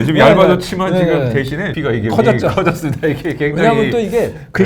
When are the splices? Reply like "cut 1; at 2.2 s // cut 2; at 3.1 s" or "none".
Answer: cut 1; at 1.7 s